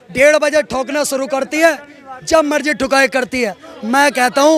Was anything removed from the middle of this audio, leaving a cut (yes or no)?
no